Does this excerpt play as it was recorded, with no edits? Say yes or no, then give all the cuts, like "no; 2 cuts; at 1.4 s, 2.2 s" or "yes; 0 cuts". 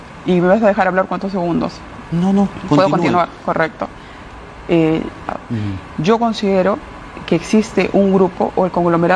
no; 1 cut; at 5.3 s